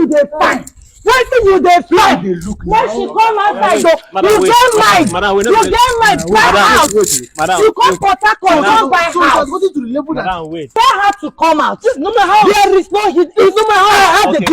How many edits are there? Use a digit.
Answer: 1